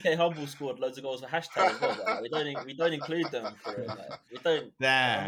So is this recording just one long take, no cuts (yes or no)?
yes